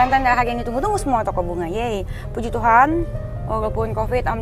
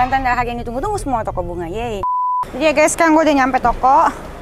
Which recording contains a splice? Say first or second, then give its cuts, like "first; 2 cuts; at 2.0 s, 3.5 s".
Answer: second; 1 cut; at 2.4 s